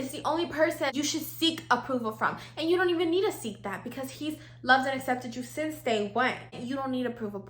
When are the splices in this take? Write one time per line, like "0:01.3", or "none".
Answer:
0:00.9
0:06.6